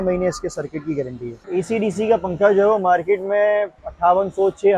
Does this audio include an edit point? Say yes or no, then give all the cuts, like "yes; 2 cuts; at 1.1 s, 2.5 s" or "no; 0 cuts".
yes; 2 cuts; at 1.4 s, 3.8 s